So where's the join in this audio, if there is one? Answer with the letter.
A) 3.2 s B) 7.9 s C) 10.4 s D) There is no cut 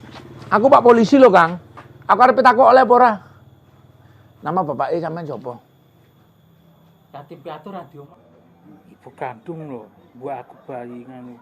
B